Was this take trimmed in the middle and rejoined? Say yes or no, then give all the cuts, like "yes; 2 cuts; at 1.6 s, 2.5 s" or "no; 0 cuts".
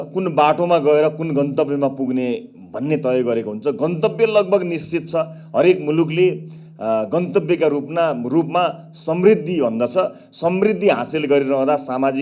no; 0 cuts